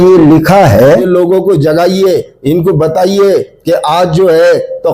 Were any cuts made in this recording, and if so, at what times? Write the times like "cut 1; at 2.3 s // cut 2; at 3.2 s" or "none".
cut 1; at 1.1 s